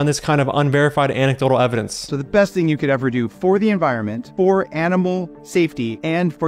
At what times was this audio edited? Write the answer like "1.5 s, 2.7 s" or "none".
2.0 s